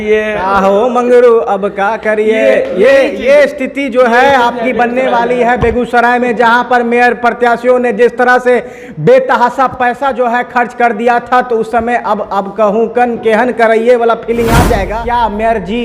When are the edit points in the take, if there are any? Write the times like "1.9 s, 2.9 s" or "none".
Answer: 14.9 s

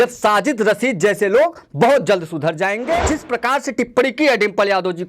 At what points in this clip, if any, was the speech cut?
3.1 s

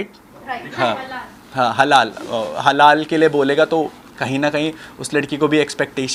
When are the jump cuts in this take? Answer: none

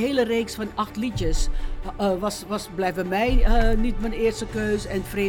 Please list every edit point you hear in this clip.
none

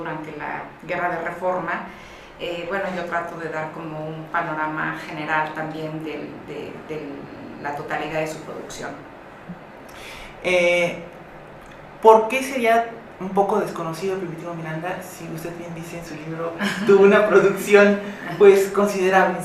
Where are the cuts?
3.3 s

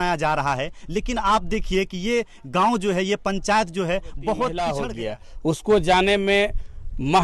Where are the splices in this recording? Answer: 4.8 s

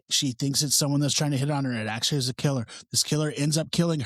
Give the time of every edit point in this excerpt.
none

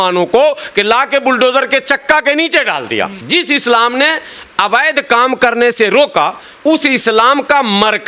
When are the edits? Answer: 3.1 s

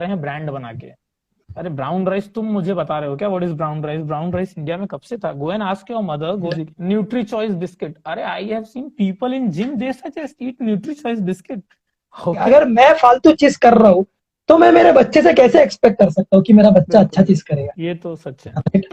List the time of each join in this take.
6.6 s, 12.4 s

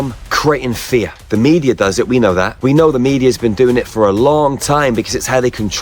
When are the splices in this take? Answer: 1.2 s, 2.5 s

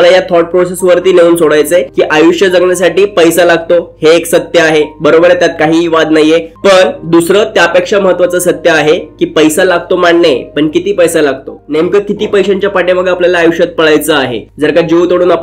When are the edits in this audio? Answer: none

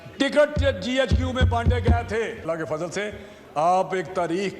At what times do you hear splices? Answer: 2.4 s

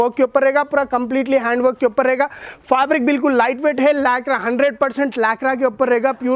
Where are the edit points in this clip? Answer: none

